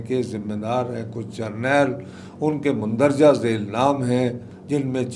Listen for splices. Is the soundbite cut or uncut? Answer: uncut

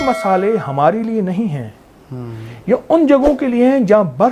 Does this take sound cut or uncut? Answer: uncut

